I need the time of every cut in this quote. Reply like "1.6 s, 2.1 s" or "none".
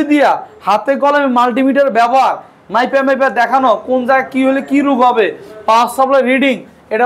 none